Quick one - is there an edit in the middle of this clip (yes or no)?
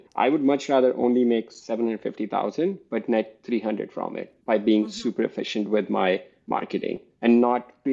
no